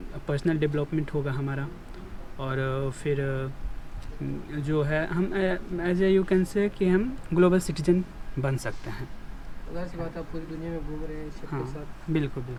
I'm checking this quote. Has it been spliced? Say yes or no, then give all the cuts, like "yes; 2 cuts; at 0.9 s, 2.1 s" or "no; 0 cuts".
no; 0 cuts